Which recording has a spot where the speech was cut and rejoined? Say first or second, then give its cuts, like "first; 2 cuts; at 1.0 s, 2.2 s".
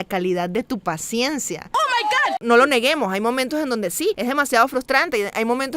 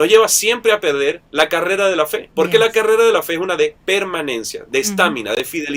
first; 1 cut; at 1.8 s